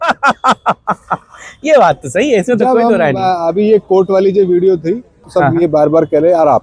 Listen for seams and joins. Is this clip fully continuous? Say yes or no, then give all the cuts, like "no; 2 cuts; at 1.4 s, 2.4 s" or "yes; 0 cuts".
no; 1 cut; at 5.2 s